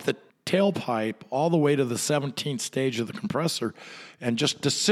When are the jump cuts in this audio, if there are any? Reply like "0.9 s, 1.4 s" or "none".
none